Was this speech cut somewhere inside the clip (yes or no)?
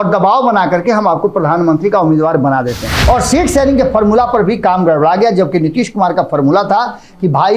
yes